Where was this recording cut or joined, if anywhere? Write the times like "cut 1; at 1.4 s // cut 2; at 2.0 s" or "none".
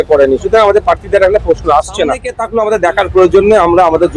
cut 1; at 2.4 s